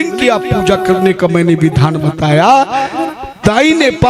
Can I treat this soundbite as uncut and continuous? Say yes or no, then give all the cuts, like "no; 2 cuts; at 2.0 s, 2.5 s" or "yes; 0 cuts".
yes; 0 cuts